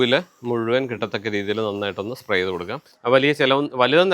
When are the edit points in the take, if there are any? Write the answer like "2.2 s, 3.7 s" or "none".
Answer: 2.9 s